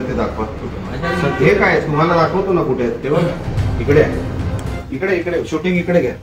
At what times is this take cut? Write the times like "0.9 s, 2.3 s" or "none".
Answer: 4.8 s